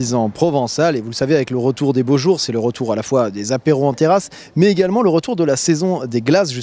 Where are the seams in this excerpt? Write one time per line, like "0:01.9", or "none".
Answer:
none